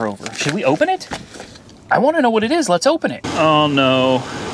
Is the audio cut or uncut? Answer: cut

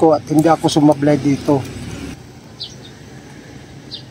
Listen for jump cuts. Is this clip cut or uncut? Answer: cut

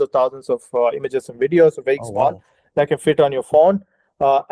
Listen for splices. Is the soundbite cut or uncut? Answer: uncut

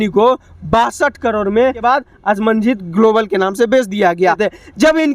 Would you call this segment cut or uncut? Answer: cut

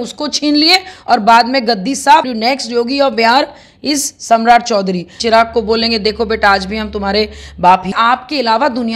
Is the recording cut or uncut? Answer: cut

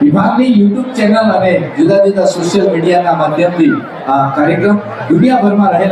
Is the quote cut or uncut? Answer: uncut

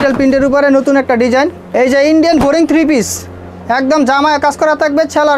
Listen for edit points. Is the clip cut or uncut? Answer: cut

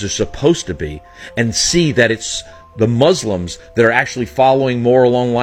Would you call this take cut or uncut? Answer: uncut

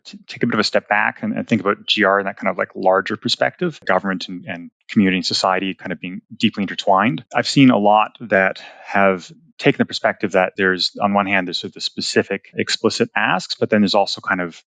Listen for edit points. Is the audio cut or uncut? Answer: cut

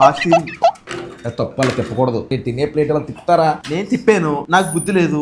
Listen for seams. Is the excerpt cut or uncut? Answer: cut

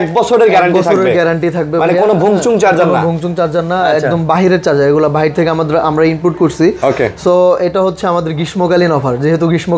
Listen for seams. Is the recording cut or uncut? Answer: uncut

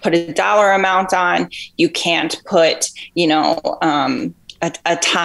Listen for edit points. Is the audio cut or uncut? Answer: uncut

